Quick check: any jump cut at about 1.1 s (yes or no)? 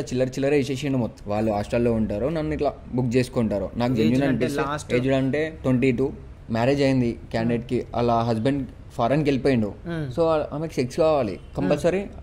yes